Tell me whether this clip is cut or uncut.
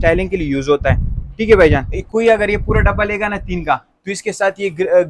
cut